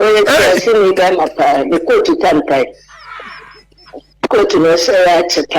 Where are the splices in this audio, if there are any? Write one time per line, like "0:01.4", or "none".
0:04.1